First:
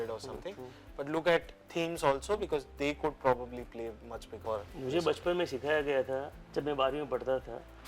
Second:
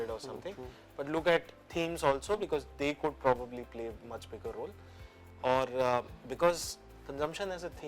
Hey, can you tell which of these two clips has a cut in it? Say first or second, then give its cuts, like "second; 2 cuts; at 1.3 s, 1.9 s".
first; 1 cut; at 4.4 s